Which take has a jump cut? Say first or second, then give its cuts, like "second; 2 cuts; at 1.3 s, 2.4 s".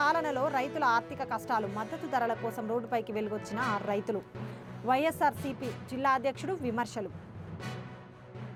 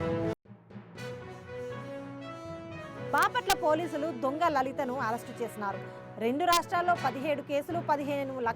second; 1 cut; at 3.0 s